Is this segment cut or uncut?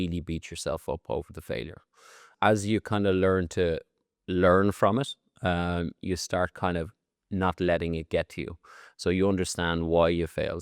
cut